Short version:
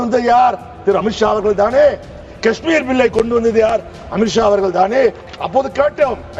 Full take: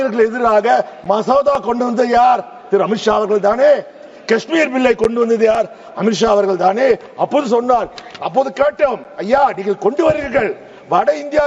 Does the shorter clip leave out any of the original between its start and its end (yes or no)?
yes